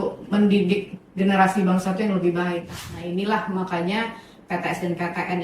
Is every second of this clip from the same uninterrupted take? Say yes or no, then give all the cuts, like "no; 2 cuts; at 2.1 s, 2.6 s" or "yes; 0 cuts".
no; 1 cut; at 2.7 s